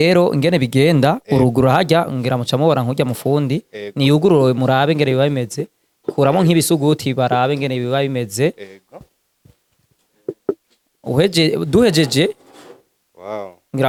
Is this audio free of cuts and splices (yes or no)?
yes